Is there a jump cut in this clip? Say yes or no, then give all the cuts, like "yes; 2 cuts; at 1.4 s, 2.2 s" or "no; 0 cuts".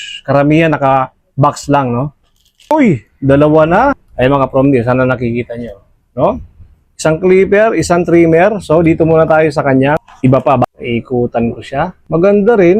yes; 2 cuts; at 2.7 s, 10.6 s